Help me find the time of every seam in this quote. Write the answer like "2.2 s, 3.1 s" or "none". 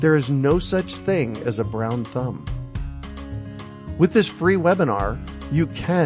2.5 s, 4.0 s